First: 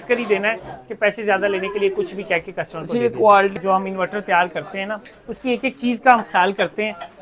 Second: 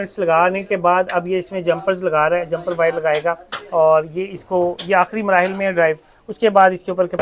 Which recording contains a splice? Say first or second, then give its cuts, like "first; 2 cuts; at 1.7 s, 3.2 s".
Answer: first; 1 cut; at 3.5 s